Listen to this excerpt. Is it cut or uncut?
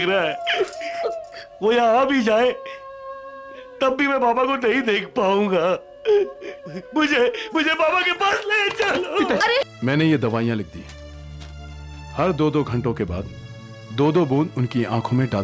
cut